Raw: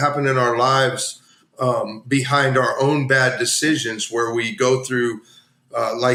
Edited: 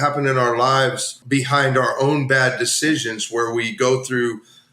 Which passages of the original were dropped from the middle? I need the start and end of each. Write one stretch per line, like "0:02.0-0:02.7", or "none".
0:01.2-0:02.0